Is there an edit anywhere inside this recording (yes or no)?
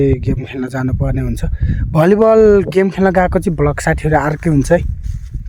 no